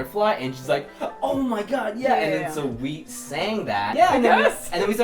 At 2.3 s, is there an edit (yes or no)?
no